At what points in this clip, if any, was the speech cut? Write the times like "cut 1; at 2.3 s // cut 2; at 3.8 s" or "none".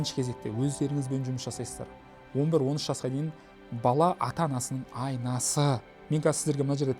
cut 1; at 5.9 s